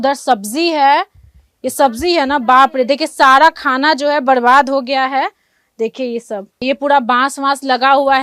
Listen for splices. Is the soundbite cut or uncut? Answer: uncut